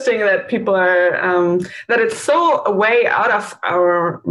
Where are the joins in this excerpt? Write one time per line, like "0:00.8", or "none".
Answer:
none